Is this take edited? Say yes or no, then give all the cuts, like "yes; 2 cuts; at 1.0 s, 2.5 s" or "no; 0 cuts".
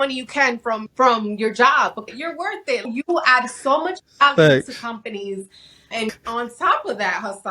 yes; 3 cuts; at 0.9 s, 2.3 s, 6.1 s